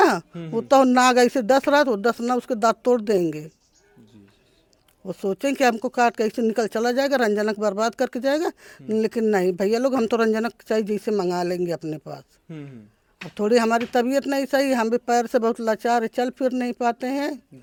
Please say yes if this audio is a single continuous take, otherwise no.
yes